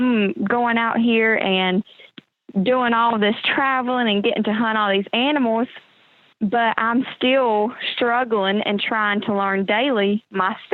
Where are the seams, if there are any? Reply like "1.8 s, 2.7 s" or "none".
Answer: none